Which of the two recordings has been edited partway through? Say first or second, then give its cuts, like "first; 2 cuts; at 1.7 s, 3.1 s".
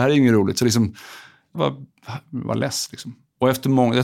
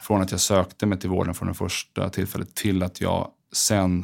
first; 1 cut; at 1.6 s